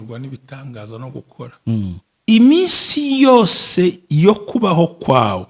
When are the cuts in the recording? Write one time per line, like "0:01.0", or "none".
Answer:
0:02.1